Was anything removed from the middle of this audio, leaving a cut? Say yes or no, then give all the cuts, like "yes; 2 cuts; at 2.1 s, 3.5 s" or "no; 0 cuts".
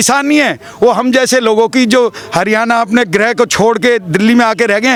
no; 0 cuts